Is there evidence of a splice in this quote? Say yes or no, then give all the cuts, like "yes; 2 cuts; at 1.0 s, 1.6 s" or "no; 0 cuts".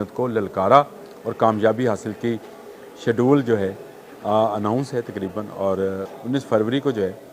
yes; 1 cut; at 6.1 s